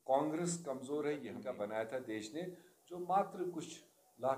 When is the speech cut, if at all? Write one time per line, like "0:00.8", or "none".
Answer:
0:01.3